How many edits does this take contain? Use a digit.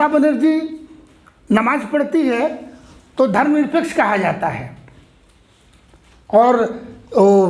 0